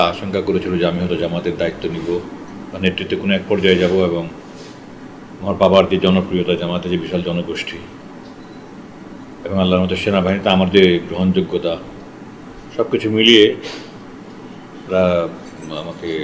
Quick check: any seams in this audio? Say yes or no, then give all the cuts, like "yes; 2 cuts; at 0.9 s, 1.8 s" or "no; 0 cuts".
no; 0 cuts